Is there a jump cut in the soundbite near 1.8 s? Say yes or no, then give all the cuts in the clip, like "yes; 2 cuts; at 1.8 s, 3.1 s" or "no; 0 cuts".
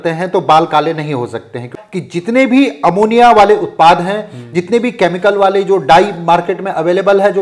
yes; 1 cut; at 1.8 s